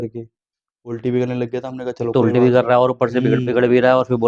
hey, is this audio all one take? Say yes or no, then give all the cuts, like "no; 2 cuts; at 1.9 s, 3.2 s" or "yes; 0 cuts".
yes; 0 cuts